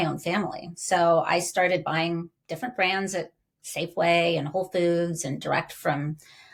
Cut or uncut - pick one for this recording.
uncut